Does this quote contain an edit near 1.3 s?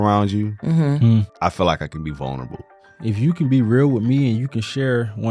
yes; 2 cuts; at 1.3 s, 2.7 s

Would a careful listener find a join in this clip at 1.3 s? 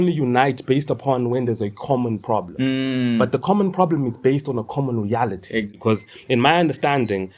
no; 1 cut; at 5.7 s

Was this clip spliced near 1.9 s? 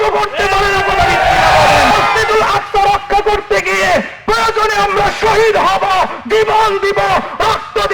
yes; 1 cut; at 1.9 s

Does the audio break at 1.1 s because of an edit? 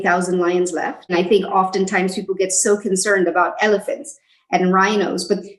yes; 1 cut; at 1.1 s

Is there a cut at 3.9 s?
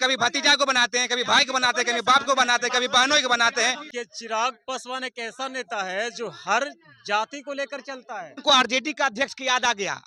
yes; 2 cuts; at 3.9 s, 8.4 s

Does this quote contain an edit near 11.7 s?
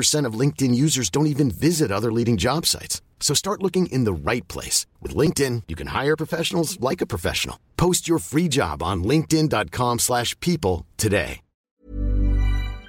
yes; 1 cut; at 11.7 s

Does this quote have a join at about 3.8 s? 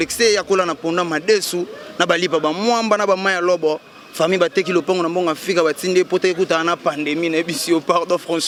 no; 0 cuts

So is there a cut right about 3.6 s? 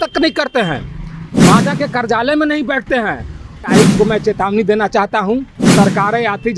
yes; 2 cuts; at 3.6 s, 5.6 s

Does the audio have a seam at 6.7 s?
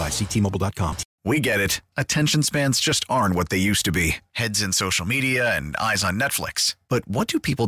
no; 1 cut; at 1.1 s

